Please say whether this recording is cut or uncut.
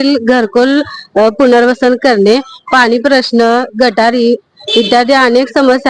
uncut